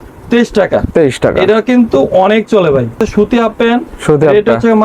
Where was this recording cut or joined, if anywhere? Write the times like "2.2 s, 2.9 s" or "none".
3.0 s